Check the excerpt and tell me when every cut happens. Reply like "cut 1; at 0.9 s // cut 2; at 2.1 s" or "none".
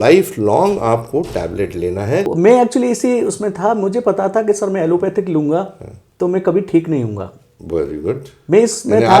cut 1; at 2.3 s